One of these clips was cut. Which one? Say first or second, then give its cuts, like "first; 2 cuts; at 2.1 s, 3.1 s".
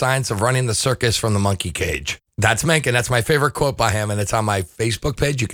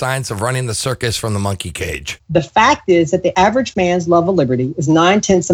second; 2 cuts; at 2.2 s, 3.3 s